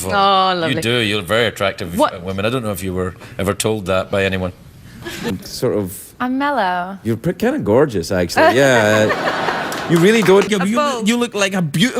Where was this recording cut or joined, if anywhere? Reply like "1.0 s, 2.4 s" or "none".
5.3 s, 10.5 s